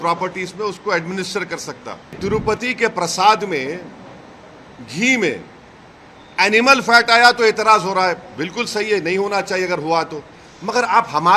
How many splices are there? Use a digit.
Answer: 1